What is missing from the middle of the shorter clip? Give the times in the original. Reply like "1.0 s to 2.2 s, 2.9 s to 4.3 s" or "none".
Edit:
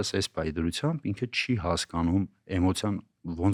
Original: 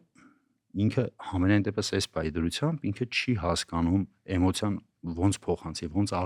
none